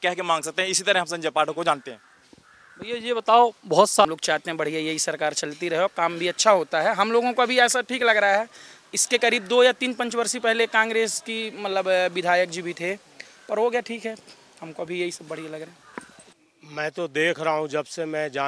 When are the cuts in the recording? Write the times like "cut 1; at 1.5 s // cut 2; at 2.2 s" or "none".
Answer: cut 1; at 4.0 s // cut 2; at 16.2 s